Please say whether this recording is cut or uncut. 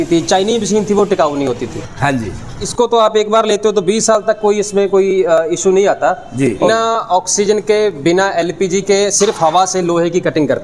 cut